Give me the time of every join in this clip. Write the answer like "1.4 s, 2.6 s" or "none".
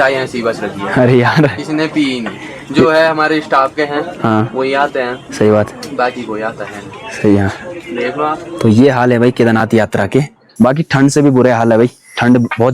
10.4 s